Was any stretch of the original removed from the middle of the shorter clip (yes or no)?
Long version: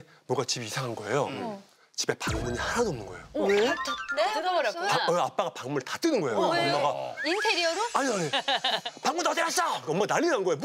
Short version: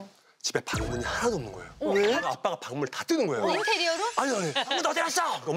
yes